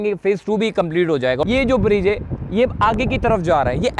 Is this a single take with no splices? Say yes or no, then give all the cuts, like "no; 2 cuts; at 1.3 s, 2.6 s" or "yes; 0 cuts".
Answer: no; 1 cut; at 1.4 s